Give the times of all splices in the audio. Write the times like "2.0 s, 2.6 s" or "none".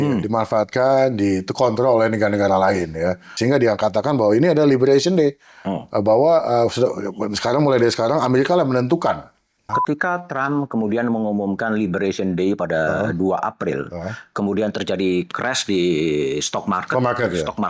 3.3 s, 9.7 s